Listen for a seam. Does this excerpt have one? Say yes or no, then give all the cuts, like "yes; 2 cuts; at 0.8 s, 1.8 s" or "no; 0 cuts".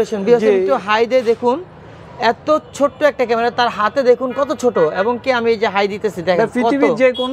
no; 0 cuts